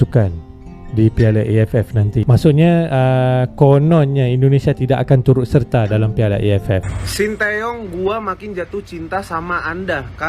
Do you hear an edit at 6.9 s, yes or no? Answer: yes